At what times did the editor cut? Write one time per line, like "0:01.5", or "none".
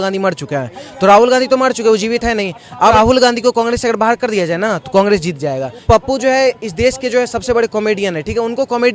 0:02.9
0:05.8